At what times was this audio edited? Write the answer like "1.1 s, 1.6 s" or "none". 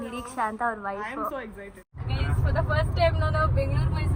2.0 s